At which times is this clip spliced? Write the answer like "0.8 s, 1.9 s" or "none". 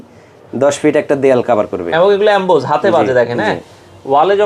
none